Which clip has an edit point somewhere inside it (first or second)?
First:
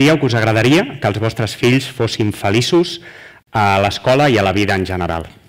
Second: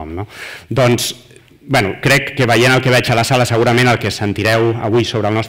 second